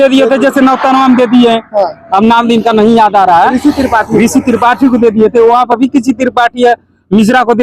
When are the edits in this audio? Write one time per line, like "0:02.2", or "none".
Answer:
none